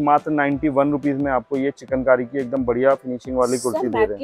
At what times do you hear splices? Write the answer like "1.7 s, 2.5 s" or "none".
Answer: none